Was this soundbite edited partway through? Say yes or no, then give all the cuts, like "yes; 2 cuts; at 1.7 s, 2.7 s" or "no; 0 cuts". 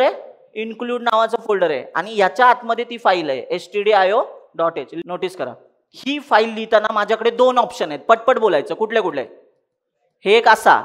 yes; 1 cut; at 4.9 s